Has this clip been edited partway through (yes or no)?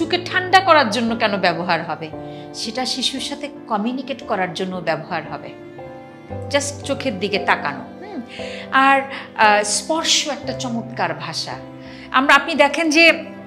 no